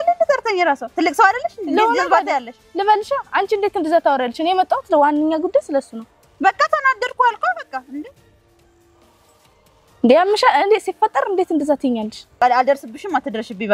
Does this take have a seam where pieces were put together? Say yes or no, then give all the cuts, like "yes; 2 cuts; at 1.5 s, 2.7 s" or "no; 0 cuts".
yes; 1 cut; at 12.4 s